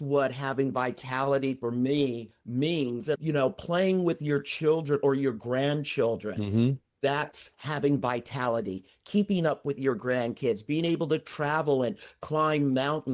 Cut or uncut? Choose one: cut